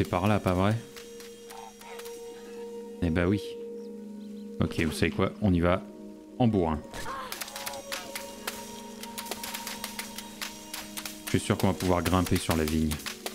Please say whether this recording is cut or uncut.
uncut